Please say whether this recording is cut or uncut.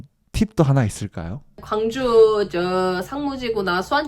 cut